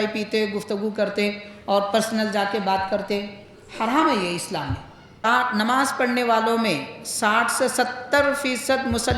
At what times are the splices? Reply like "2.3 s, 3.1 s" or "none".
5.2 s